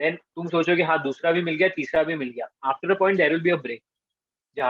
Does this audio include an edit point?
no; 0 cuts

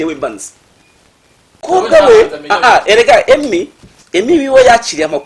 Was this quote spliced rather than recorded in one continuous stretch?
yes; 1 cut; at 1.6 s

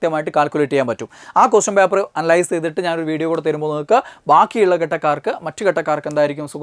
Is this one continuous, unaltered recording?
yes; 0 cuts

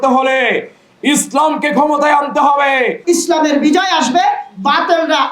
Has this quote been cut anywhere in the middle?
yes; 1 cut; at 3.0 s

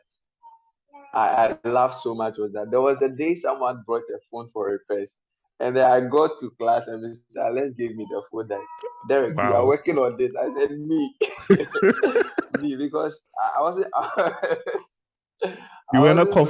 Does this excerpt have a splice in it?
no; 0 cuts

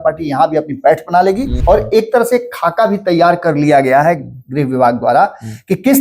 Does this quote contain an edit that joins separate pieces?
yes; 1 cut; at 1.6 s

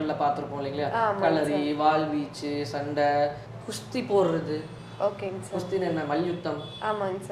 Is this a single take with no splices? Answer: yes; 0 cuts

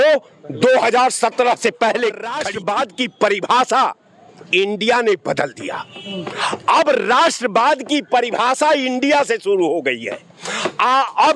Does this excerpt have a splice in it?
yes; 1 cut; at 2.5 s

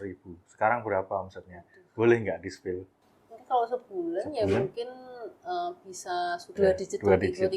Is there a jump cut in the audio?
yes; 2 cuts; at 2.9 s, 6.6 s

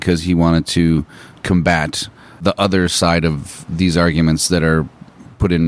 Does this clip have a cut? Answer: yes; 2 cuts; at 1.4 s, 2.4 s

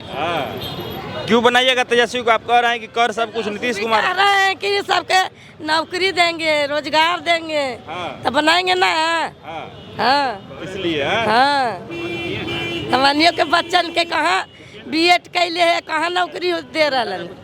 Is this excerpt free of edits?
yes; 0 cuts

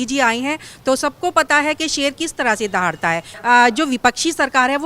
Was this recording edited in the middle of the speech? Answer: yes; 1 cut; at 3.3 s

